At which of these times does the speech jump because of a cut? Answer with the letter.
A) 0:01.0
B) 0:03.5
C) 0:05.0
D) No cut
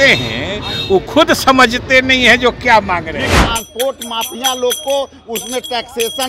B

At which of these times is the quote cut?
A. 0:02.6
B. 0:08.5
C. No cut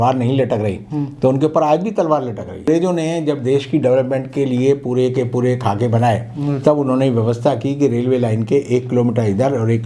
A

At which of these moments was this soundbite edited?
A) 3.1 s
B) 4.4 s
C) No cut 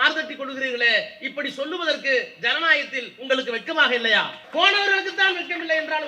B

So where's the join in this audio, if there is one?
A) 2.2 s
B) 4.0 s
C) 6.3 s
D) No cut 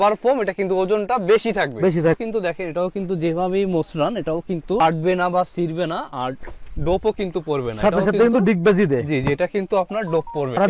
A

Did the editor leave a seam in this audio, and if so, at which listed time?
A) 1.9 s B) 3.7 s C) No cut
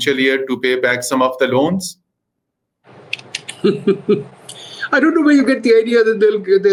C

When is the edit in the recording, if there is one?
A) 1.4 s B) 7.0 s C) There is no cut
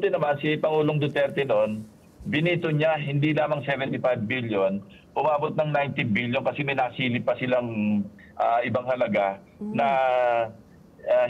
C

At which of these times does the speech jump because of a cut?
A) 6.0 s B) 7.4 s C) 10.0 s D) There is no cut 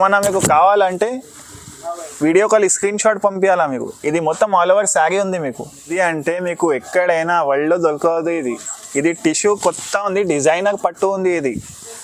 A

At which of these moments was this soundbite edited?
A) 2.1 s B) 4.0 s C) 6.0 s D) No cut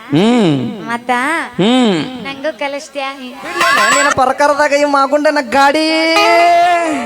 B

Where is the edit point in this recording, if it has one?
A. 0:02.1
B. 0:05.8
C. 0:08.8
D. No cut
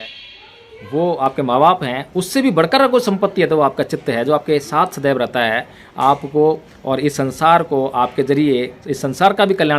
D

